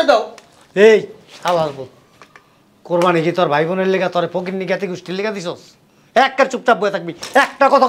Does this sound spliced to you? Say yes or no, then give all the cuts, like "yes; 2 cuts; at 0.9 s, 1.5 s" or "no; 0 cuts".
no; 0 cuts